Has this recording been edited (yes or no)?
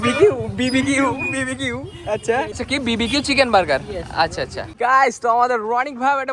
yes